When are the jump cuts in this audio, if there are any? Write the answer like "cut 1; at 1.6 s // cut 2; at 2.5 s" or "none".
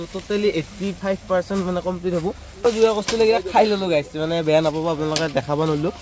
cut 1; at 2.7 s